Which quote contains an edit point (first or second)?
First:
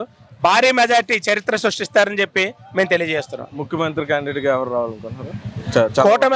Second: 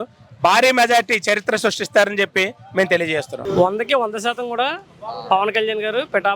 second